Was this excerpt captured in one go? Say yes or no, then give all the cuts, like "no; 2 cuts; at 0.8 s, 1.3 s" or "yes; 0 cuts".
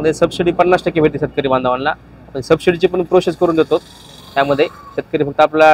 yes; 0 cuts